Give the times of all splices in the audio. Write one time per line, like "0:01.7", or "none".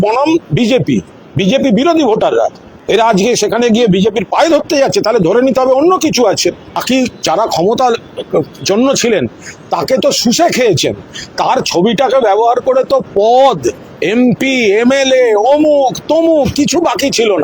0:02.7
0:06.8